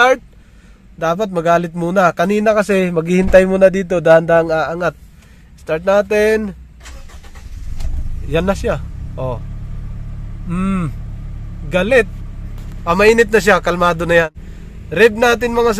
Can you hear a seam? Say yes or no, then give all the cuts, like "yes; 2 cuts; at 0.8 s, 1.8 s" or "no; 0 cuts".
yes; 1 cut; at 14.3 s